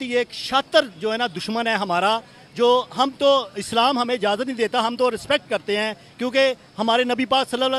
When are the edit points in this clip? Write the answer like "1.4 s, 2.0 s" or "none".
none